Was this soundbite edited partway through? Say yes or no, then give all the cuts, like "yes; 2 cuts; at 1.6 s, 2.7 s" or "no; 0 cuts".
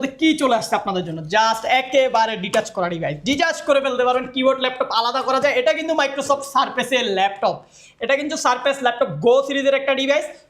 no; 0 cuts